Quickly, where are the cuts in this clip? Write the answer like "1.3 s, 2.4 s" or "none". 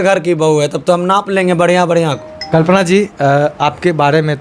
2.5 s